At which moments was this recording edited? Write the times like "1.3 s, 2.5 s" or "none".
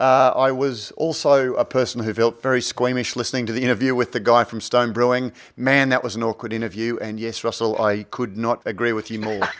8.6 s